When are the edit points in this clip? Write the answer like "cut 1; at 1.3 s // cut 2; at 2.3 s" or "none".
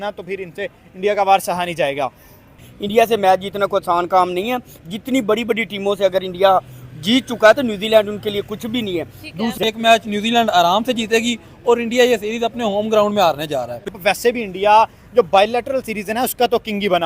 cut 1; at 2.7 s // cut 2; at 9.6 s // cut 3; at 14.0 s